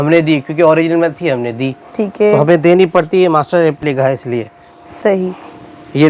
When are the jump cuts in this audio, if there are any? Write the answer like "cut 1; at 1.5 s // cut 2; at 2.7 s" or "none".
none

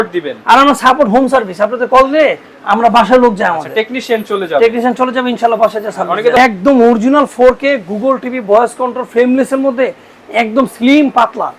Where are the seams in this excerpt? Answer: cut 1; at 6.4 s

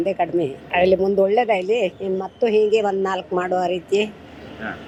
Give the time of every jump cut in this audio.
none

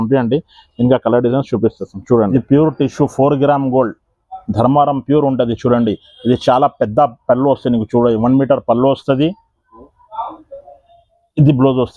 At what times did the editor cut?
cut 1; at 2.3 s

